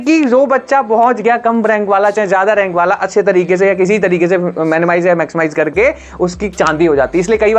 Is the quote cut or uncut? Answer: uncut